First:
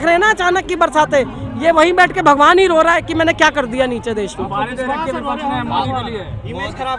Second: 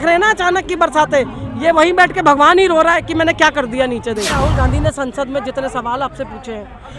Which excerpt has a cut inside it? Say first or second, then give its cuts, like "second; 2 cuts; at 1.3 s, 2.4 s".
second; 1 cut; at 4.5 s